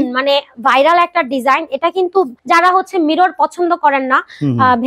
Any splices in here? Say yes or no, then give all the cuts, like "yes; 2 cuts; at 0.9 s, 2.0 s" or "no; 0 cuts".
yes; 1 cut; at 2.4 s